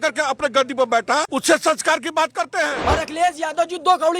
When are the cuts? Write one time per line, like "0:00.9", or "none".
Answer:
0:01.3
0:02.8

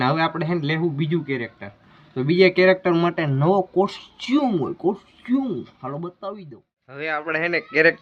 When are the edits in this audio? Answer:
0:07.1

